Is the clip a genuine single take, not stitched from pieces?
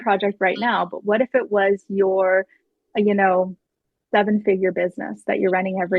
yes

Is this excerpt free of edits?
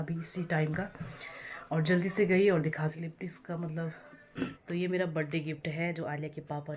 no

